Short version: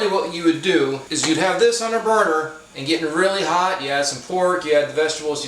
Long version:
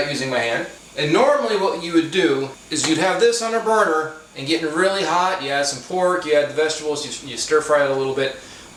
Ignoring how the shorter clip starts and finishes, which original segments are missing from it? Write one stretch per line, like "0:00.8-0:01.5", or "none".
0:02.6-0:02.7